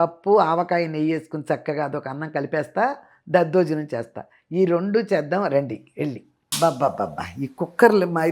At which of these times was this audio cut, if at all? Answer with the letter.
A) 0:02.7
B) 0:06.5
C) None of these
B